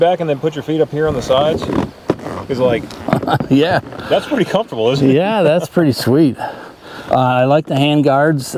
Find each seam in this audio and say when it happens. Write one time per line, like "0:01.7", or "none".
none